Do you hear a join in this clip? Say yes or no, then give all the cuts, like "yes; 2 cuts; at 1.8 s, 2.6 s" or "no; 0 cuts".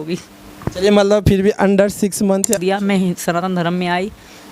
yes; 1 cut; at 2.6 s